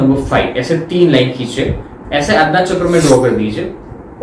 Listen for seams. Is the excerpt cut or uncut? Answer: cut